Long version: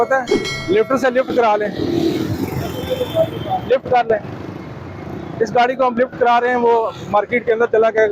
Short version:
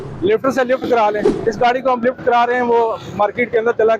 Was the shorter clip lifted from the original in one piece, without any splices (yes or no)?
no